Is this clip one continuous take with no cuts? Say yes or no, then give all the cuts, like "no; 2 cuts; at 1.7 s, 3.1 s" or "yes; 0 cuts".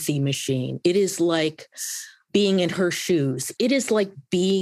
no; 1 cut; at 3.4 s